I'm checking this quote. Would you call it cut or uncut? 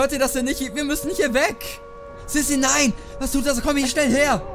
uncut